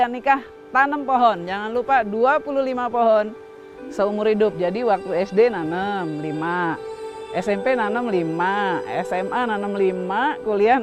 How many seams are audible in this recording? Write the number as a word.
zero